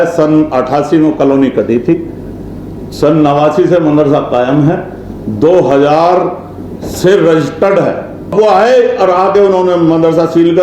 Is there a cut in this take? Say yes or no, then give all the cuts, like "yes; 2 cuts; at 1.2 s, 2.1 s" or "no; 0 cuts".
yes; 1 cut; at 8.3 s